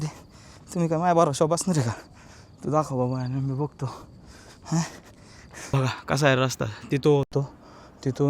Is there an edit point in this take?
yes; 1 cut; at 5.6 s

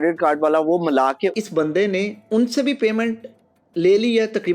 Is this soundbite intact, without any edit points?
no; 1 cut; at 1.3 s

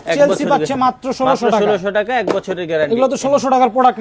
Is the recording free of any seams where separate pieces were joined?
yes; 0 cuts

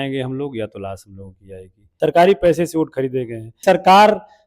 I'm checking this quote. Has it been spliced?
yes; 2 cuts; at 1.8 s, 3.6 s

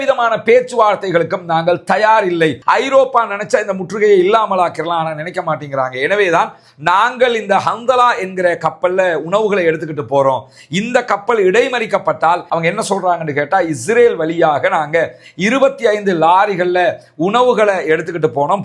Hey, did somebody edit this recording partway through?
yes; 2 cuts; at 2.6 s, 12.5 s

